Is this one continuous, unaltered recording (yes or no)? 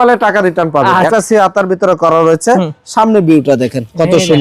no